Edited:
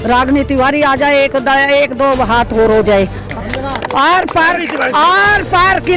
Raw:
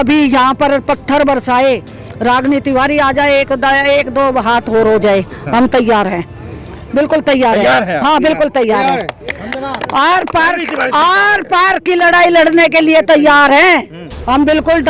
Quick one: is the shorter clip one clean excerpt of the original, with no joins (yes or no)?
no